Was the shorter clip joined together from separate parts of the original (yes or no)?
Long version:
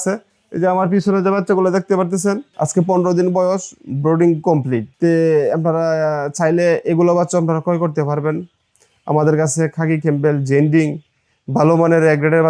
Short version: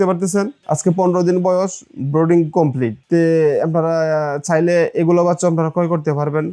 no